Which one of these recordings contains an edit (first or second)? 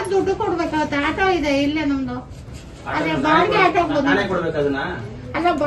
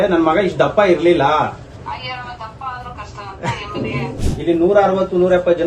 second